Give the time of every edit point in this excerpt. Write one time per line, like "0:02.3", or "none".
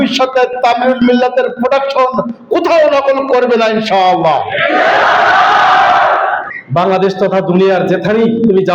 0:06.4